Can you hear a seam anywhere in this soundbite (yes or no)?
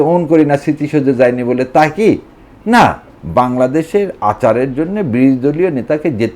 yes